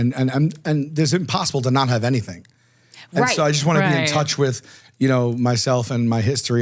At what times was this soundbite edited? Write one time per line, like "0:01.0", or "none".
none